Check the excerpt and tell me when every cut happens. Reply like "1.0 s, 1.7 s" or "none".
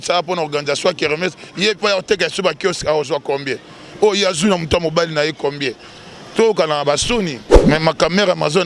7.5 s